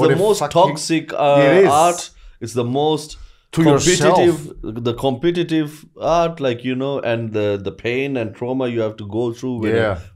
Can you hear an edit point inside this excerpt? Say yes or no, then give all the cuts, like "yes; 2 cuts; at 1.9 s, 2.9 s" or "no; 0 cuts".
no; 0 cuts